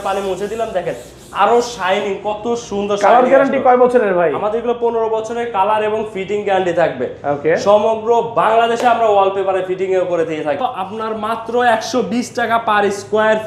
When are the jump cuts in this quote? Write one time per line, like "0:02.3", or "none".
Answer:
0:10.7